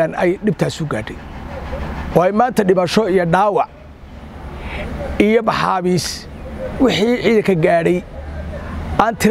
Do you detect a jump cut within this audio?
no; 0 cuts

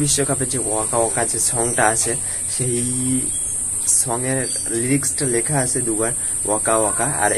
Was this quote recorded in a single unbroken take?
yes; 0 cuts

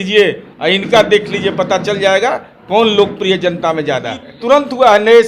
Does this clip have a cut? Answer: yes; 1 cut; at 4.3 s

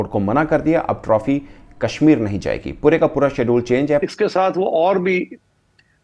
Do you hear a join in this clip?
yes; 1 cut; at 4.0 s

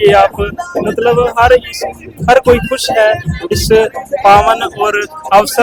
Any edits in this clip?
no; 0 cuts

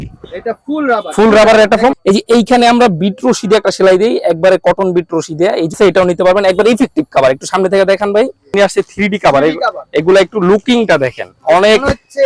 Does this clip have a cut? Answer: yes; 3 cuts; at 2.0 s, 5.7 s, 8.5 s

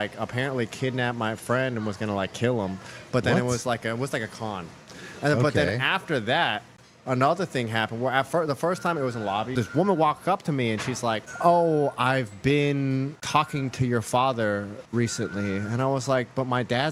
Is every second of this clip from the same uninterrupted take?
yes; 0 cuts

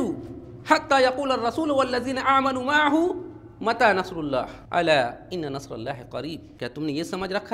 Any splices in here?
yes; 2 cuts; at 4.6 s, 6.5 s

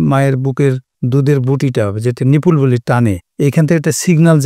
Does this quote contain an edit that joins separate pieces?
yes; 2 cuts; at 0.9 s, 3.2 s

